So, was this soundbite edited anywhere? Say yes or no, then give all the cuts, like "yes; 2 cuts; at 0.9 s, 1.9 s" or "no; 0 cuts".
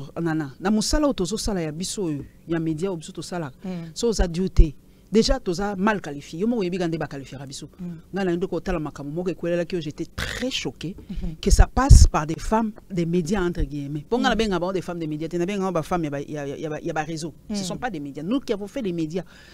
no; 0 cuts